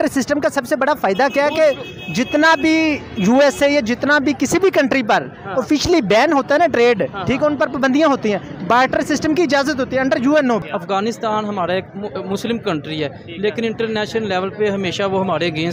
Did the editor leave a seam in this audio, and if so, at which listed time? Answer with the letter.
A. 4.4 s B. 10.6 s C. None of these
B